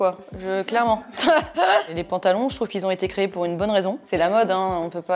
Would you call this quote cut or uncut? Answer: cut